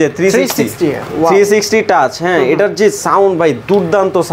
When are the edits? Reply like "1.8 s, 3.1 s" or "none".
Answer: none